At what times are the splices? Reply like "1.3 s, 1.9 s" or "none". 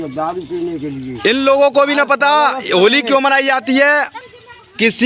1.1 s, 4.1 s